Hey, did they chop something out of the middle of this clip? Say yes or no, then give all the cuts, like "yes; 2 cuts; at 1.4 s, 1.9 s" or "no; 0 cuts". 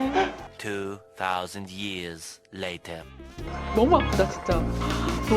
yes; 1 cut; at 3.6 s